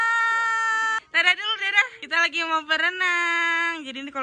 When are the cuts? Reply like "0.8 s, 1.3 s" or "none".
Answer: 2.0 s